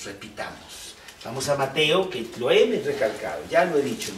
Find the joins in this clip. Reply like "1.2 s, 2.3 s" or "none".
1.2 s